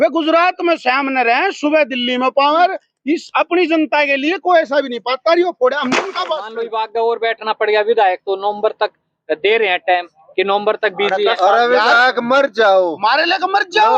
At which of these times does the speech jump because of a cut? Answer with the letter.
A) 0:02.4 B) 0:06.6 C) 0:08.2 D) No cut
B